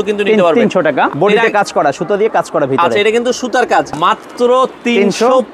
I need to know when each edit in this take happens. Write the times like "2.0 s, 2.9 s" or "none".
1.1 s, 3.9 s